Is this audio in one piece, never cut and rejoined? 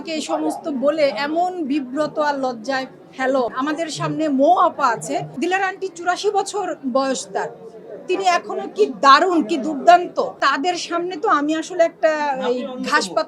no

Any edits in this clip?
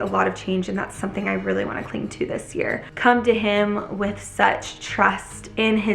yes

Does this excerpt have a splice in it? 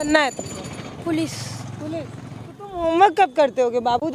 yes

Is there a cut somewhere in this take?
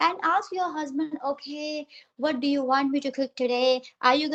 no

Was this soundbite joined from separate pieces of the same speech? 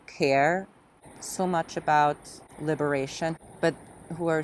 yes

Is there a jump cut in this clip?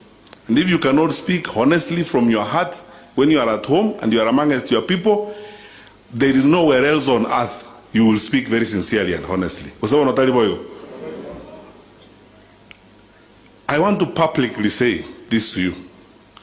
no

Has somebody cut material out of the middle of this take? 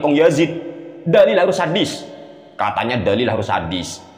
no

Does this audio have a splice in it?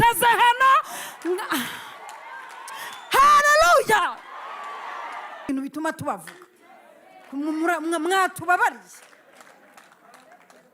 yes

